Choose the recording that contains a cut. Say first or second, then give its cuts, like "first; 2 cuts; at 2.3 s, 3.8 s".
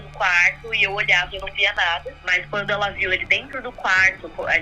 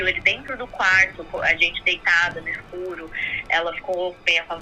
first; 1 cut; at 2.1 s